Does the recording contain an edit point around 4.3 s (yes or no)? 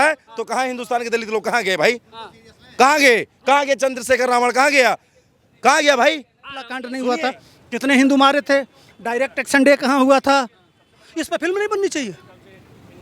no